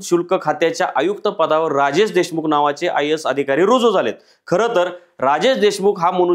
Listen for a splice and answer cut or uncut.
uncut